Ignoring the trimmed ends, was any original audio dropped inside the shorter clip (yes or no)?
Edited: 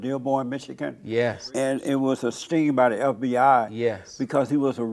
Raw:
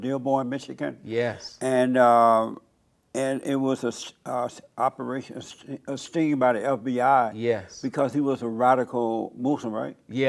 yes